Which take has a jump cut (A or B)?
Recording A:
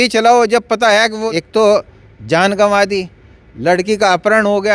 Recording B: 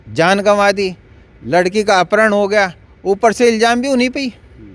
A